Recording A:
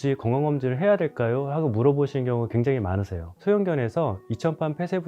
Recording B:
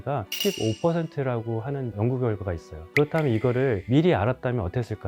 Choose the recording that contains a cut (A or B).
A